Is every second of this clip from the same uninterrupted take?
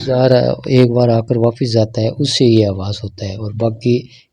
yes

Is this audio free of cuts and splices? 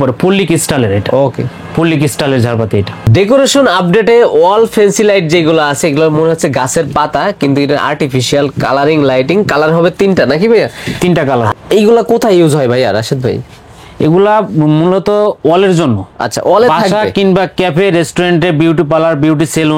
yes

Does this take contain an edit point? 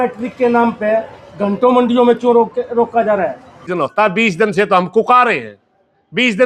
yes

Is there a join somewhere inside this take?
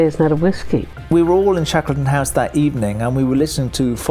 yes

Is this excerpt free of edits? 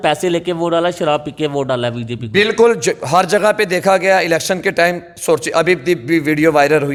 yes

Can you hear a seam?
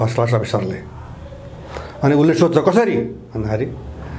no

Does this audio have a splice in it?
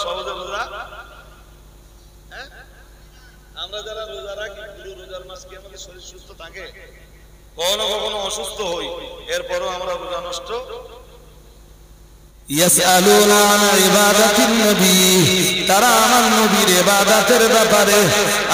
yes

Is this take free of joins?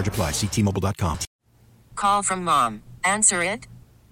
no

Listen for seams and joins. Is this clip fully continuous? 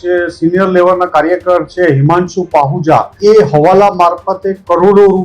no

